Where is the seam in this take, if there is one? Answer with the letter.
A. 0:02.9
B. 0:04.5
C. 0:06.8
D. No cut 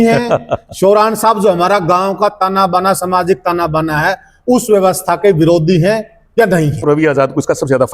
C